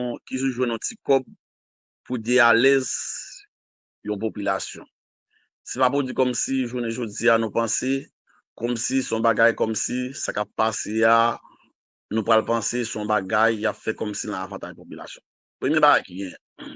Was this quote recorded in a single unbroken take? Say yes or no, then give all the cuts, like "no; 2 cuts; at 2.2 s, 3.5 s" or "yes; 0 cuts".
yes; 0 cuts